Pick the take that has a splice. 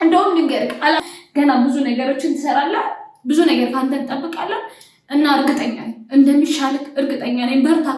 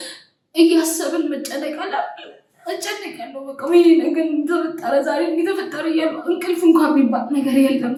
first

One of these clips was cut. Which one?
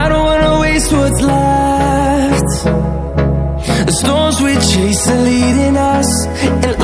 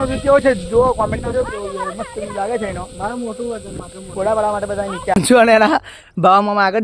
second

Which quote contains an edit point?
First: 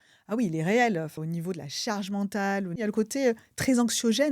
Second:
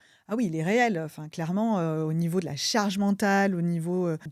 first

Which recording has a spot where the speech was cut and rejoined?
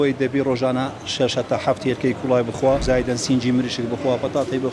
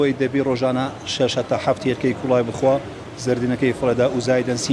first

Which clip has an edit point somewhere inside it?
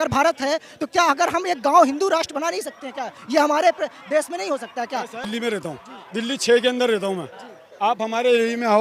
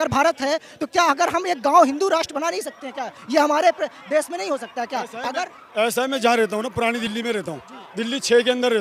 first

